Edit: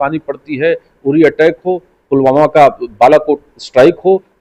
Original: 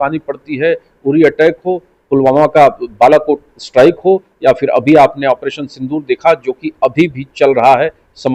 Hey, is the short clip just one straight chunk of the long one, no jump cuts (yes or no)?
yes